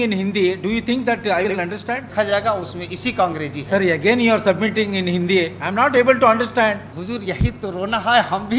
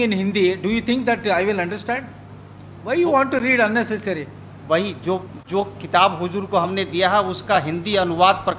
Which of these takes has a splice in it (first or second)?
first